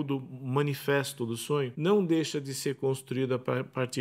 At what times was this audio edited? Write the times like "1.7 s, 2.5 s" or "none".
1.7 s